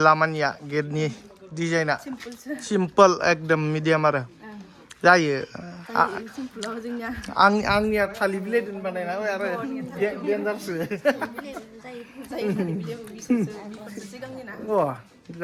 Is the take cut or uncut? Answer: uncut